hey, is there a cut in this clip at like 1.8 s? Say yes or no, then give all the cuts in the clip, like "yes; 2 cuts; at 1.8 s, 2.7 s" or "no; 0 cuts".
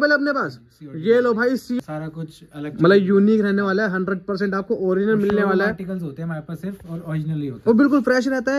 yes; 1 cut; at 1.8 s